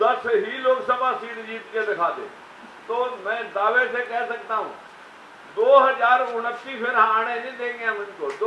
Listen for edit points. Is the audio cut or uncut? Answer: uncut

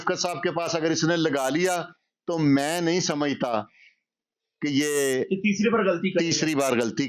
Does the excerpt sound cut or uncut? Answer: uncut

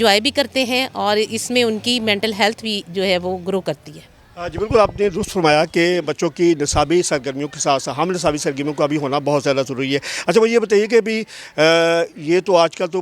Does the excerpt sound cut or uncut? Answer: uncut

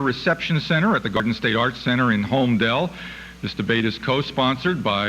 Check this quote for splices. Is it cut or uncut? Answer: cut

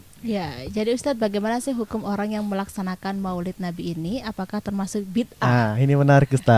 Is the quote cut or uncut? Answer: uncut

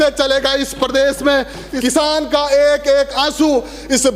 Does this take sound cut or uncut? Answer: cut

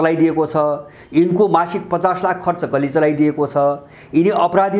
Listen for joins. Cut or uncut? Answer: uncut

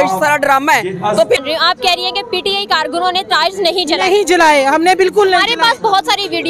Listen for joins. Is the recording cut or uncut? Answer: cut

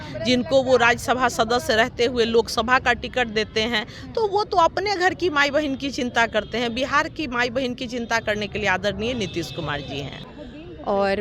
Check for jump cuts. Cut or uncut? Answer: cut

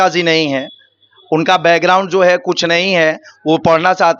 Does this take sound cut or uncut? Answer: uncut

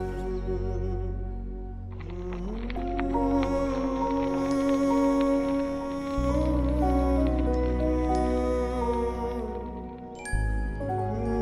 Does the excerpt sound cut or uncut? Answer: uncut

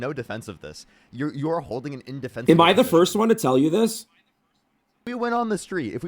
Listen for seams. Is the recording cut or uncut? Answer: cut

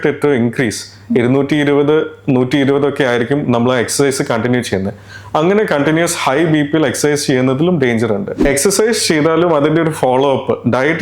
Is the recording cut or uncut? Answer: cut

